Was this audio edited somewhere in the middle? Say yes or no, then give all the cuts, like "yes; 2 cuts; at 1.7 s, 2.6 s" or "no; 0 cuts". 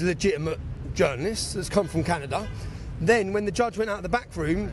no; 0 cuts